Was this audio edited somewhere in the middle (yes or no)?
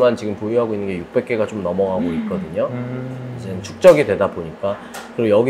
no